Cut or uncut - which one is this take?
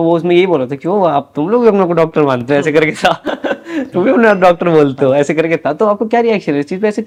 uncut